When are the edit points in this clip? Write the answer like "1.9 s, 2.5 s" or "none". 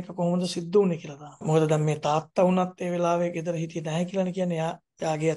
1.4 s